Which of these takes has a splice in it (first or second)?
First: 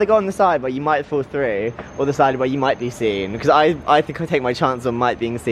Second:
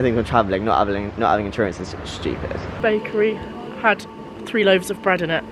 second